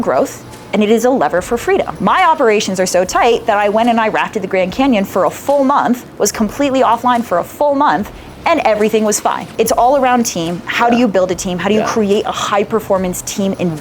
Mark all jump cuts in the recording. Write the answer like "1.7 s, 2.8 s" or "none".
1.9 s, 9.5 s